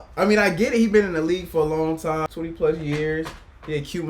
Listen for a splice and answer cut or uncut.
cut